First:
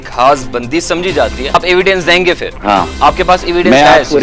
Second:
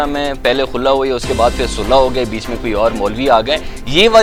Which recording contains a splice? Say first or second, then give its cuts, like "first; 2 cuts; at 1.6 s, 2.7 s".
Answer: first; 2 cuts; at 1.6 s, 2.5 s